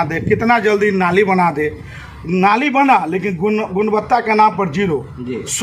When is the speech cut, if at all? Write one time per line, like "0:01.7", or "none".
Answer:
none